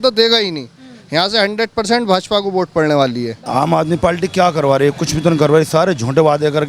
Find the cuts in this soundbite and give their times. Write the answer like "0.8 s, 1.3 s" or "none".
3.4 s